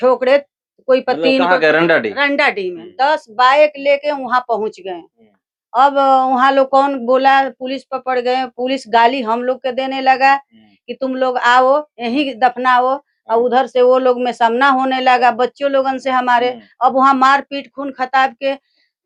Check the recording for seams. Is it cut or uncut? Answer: uncut